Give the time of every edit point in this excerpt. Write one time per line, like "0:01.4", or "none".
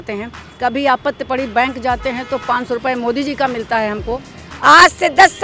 0:04.5